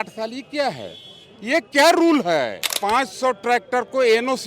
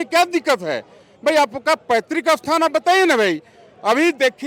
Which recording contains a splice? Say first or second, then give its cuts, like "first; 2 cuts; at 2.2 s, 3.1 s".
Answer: first; 1 cut; at 2.7 s